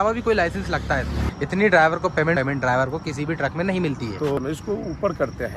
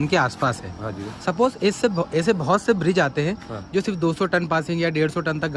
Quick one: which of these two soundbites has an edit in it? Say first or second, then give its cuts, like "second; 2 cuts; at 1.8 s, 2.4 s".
first; 3 cuts; at 1.2 s, 2.4 s, 4.4 s